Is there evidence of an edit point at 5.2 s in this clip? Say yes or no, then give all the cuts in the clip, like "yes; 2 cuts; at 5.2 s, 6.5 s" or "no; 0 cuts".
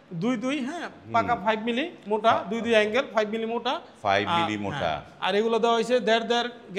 no; 0 cuts